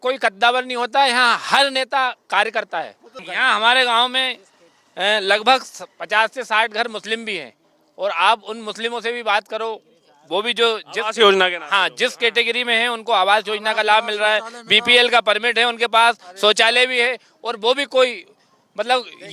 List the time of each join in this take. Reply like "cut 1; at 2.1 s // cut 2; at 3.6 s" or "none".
cut 1; at 3.2 s